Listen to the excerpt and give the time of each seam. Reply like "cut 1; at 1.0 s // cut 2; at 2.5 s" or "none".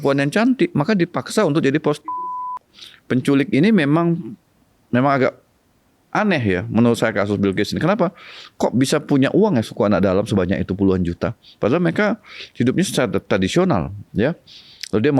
cut 1; at 2.7 s